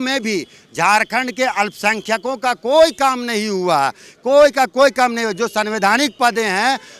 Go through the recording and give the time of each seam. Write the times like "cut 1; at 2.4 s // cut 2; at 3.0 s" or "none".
none